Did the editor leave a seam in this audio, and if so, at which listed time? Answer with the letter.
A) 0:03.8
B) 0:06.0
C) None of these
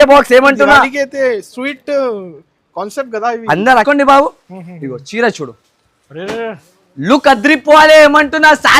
A